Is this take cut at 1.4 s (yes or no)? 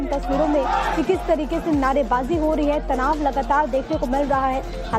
yes